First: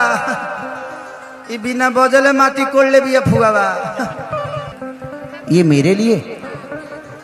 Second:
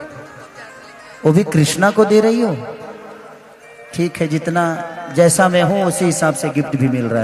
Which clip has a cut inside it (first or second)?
first